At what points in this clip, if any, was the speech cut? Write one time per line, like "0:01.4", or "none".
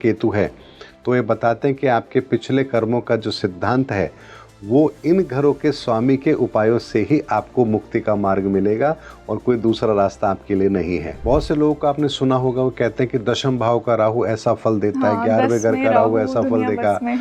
0:11.1